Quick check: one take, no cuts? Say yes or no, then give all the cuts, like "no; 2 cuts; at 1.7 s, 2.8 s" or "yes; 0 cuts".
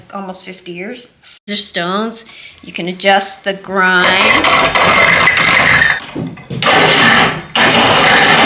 no; 1 cut; at 6.0 s